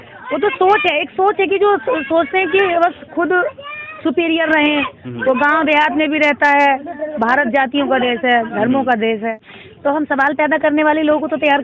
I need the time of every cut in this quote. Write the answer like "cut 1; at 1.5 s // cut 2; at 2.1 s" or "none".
cut 1; at 9.4 s